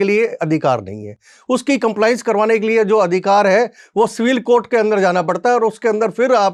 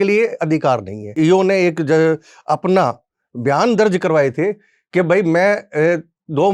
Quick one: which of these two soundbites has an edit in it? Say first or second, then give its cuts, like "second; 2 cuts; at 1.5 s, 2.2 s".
second; 1 cut; at 1.2 s